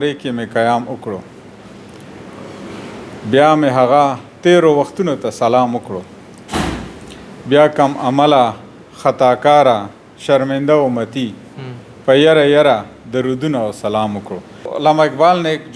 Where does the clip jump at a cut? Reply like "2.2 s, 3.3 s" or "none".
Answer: 14.7 s